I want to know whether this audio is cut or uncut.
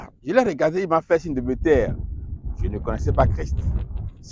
uncut